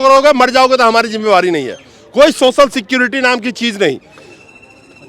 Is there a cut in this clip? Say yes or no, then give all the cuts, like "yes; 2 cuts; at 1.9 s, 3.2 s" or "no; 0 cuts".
no; 0 cuts